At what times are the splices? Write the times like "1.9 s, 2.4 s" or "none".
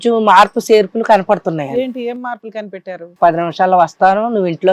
3.1 s